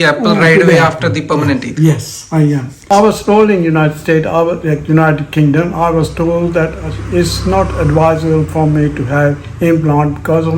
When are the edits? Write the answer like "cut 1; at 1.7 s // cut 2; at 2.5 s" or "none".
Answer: cut 1; at 2.9 s